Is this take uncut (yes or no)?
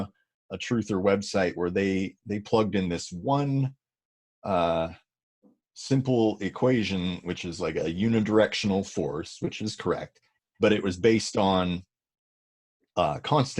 yes